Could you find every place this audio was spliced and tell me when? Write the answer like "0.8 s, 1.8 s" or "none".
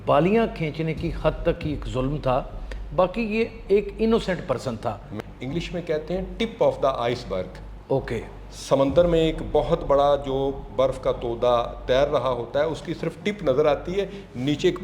5.1 s